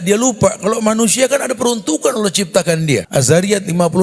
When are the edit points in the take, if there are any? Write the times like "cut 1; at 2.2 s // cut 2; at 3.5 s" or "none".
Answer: cut 1; at 3.1 s